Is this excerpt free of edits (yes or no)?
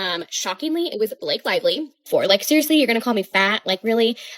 no